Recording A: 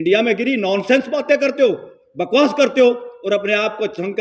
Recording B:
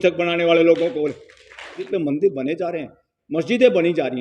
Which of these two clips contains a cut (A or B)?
B